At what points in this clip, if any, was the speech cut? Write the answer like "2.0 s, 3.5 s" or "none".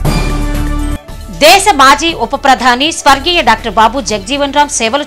none

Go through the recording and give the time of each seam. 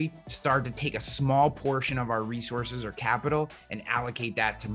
none

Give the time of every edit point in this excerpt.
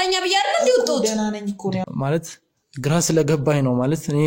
1.9 s

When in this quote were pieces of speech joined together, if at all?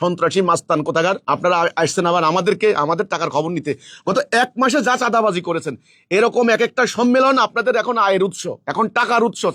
none

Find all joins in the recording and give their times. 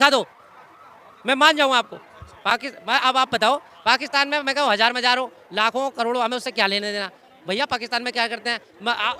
none

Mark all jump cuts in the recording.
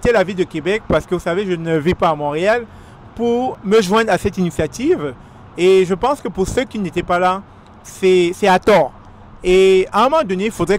3.5 s

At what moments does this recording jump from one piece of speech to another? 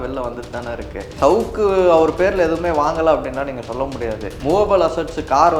1.1 s, 4.3 s

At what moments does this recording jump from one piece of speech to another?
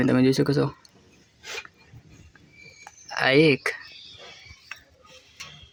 none

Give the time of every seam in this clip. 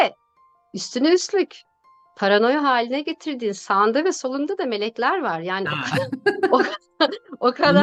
none

